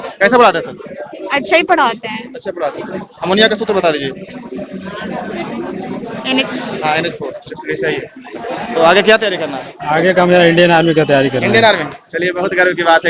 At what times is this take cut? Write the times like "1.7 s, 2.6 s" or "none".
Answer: 2.8 s, 8.4 s